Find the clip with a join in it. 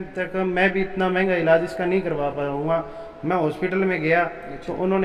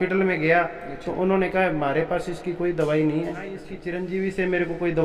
second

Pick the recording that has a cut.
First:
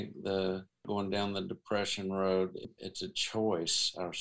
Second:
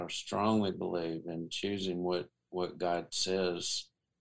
first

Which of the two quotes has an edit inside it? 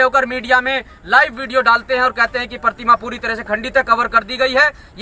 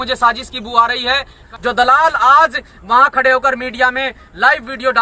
second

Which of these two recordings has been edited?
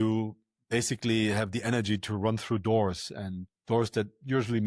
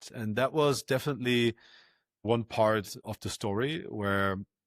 second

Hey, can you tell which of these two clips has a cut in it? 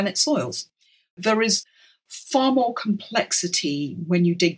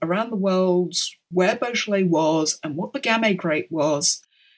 first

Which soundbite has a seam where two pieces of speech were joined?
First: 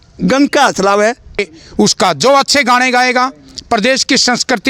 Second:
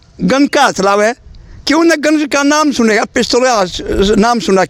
first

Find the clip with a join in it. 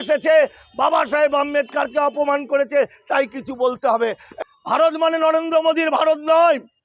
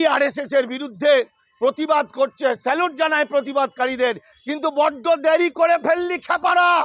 first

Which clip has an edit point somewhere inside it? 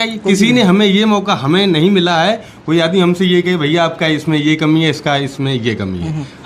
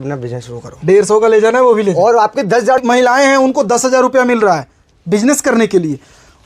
second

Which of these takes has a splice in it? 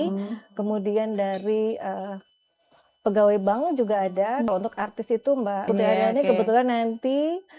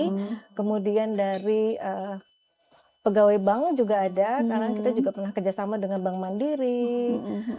first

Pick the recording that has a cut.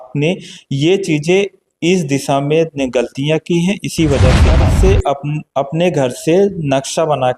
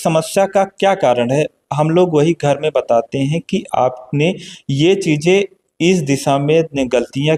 first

